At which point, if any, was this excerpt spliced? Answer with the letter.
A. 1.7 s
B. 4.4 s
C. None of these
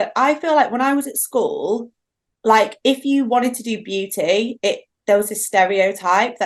C